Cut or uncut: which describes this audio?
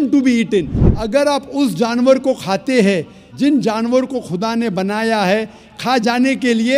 uncut